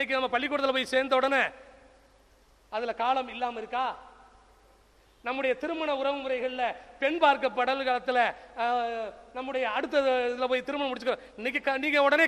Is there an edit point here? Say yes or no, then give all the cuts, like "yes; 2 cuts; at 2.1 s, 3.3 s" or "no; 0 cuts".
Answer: no; 0 cuts